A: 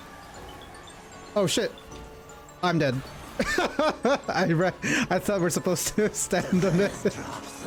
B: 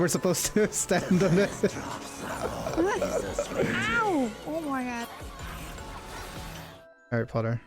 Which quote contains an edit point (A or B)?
B